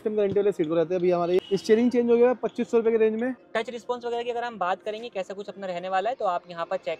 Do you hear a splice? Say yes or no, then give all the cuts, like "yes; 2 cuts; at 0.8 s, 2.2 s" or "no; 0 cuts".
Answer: yes; 2 cuts; at 1.4 s, 3.4 s